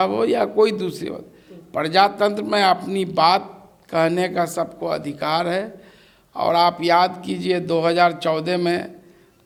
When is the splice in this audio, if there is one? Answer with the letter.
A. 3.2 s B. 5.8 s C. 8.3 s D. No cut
D